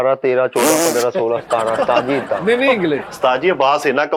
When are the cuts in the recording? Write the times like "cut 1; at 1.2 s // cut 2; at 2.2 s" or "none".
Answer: cut 1; at 3.0 s